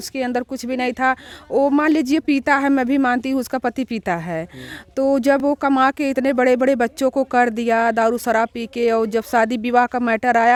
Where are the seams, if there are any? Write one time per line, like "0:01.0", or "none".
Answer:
none